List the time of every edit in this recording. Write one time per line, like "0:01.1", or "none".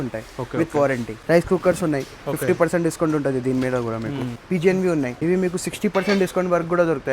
0:01.2
0:04.4
0:05.2